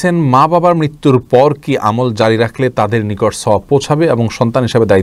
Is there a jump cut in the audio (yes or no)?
no